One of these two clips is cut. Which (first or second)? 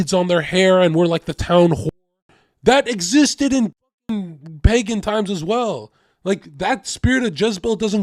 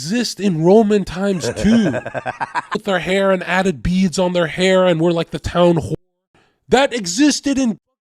second